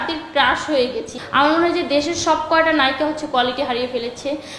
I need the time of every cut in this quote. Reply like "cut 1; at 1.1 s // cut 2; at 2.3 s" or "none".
cut 1; at 1.1 s